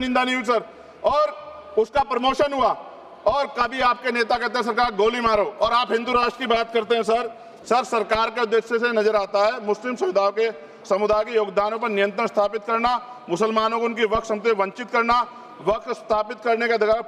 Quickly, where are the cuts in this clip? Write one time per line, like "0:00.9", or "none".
0:07.5